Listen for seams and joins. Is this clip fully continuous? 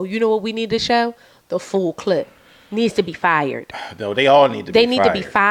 yes; 0 cuts

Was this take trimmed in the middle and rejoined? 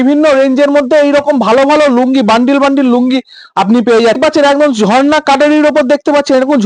yes; 1 cut; at 4.2 s

